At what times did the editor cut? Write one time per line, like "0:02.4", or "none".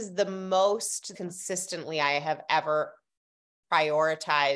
0:01.1